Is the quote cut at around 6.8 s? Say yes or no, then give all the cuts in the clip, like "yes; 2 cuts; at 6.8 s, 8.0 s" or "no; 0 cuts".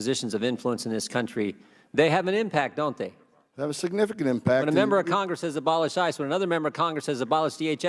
no; 0 cuts